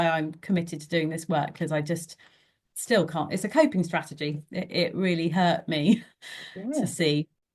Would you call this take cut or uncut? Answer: uncut